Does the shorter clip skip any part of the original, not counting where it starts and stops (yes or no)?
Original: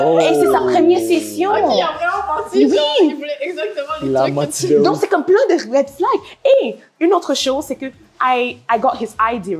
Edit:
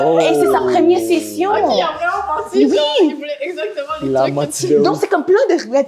no